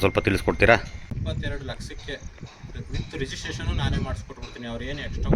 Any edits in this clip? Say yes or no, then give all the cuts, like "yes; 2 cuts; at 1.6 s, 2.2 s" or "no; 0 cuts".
yes; 1 cut; at 1.2 s